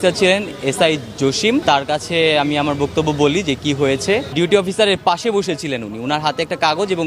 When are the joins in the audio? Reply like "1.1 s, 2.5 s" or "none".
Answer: 1.6 s, 4.3 s